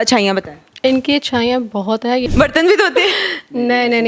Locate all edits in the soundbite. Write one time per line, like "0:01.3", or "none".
0:02.2